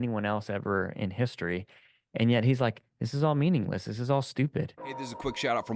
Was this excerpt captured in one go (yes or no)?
no